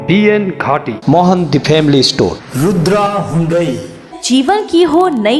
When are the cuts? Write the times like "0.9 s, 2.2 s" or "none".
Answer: 2.4 s, 4.2 s